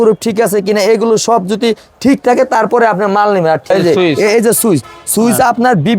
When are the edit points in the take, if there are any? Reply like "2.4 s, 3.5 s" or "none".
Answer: 3.7 s